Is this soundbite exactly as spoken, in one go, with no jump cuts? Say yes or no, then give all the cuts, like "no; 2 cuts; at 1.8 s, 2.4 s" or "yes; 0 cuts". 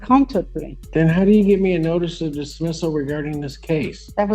yes; 0 cuts